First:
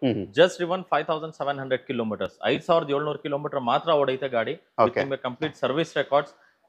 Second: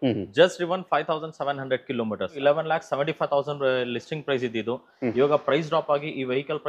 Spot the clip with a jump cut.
second; 1 cut; at 2.3 s

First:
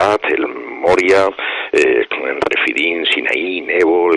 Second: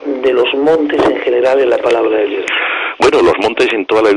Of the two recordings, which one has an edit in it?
second; 1 cut; at 2.0 s

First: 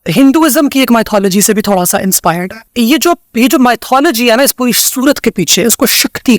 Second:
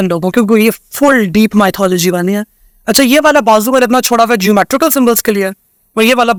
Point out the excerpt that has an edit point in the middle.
first; 1 cut; at 2.6 s

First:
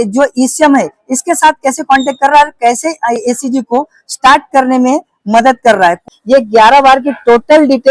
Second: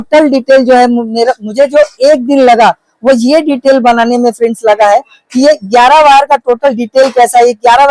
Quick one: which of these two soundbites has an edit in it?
first; 1 cut; at 6.0 s

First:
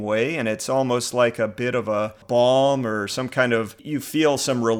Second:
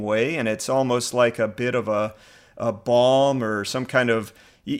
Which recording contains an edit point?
first; 2 cuts; at 2.2 s, 3.8 s

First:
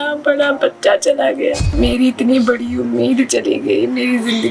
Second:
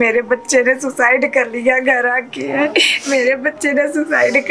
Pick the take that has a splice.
first; 1 cut; at 1.7 s

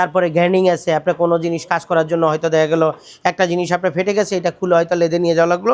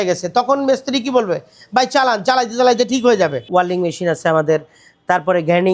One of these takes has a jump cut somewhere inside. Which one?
second; 1 cut; at 3.4 s

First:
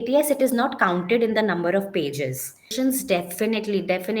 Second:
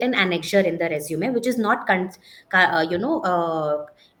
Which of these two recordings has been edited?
first; 1 cut; at 2.7 s

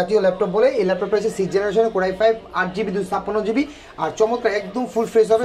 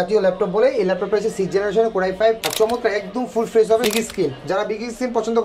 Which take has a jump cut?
second; 2 cuts; at 2.5 s, 3.9 s

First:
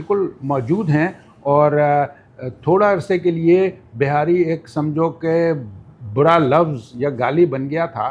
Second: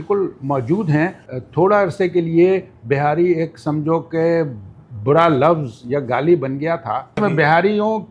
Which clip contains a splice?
second; 2 cuts; at 1.3 s, 7.2 s

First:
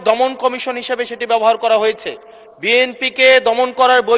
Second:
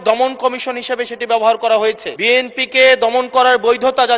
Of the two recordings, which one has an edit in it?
second; 1 cut; at 2.1 s

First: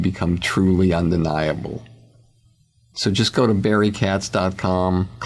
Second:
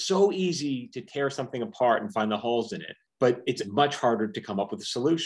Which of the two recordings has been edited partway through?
second; 1 cut; at 3.6 s

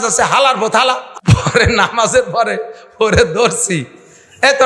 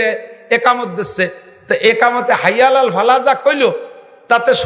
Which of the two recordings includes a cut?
first; 1 cut; at 1.1 s

